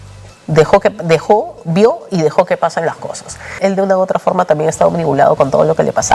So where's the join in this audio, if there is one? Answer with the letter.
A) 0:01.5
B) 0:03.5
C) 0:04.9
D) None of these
B